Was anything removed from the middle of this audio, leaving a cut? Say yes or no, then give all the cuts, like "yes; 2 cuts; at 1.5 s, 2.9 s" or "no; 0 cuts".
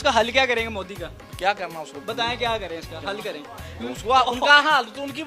no; 0 cuts